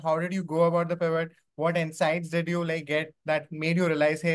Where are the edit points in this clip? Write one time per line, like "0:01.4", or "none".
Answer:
none